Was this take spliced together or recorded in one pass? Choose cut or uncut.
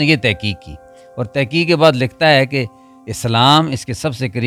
uncut